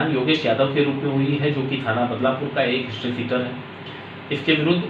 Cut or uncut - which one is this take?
uncut